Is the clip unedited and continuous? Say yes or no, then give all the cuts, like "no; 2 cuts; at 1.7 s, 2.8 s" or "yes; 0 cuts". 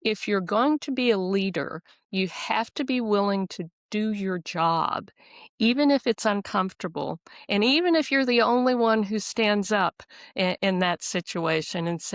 yes; 0 cuts